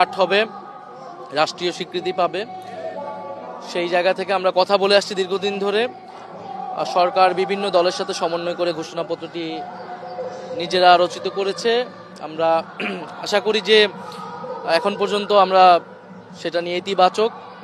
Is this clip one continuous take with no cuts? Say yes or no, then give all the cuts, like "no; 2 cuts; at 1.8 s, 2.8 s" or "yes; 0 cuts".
yes; 0 cuts